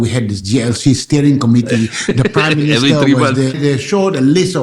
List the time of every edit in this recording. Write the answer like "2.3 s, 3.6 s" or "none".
3.6 s

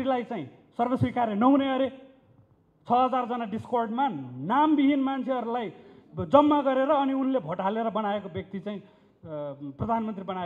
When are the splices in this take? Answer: none

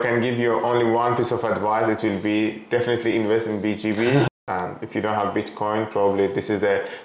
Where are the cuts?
4.3 s

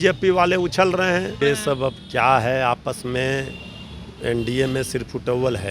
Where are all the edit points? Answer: 1.4 s

